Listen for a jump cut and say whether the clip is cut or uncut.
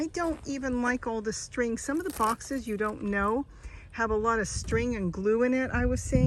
uncut